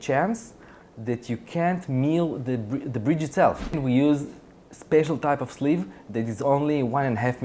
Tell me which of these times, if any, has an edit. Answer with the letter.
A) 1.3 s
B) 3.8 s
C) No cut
B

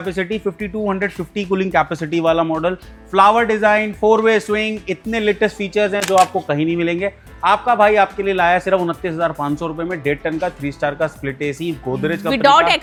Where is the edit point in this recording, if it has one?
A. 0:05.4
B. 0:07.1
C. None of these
C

